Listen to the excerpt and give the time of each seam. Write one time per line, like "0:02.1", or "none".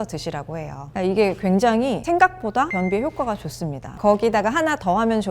none